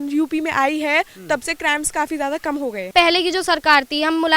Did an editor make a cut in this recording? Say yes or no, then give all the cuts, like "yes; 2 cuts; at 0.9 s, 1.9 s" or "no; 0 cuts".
yes; 1 cut; at 2.9 s